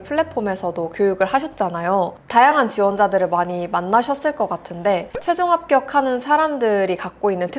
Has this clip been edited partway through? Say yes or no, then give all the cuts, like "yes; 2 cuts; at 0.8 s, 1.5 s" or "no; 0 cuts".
no; 0 cuts